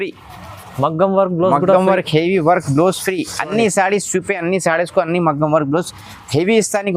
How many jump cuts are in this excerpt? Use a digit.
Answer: 0